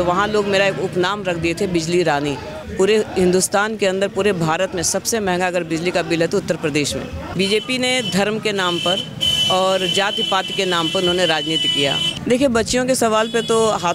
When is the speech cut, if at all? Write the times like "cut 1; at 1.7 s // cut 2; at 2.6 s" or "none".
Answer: cut 1; at 2.6 s // cut 2; at 7.2 s // cut 3; at 12.1 s

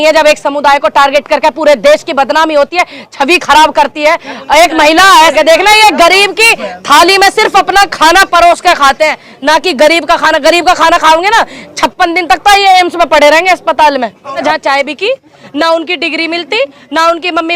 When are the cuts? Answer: cut 1; at 5.3 s // cut 2; at 14.4 s

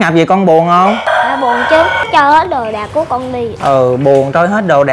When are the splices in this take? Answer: cut 1; at 1.0 s // cut 2; at 2.0 s // cut 3; at 3.5 s

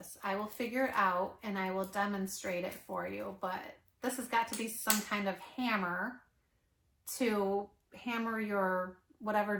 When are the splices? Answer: none

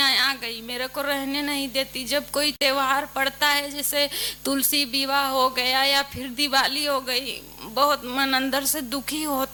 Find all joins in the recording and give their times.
none

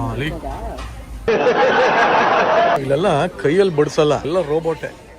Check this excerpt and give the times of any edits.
cut 1; at 2.8 s // cut 2; at 4.3 s

